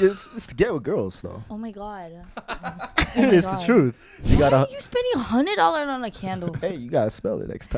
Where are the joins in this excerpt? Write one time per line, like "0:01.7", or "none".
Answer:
0:01.4
0:04.2